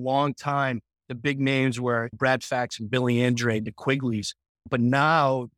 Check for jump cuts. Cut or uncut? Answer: uncut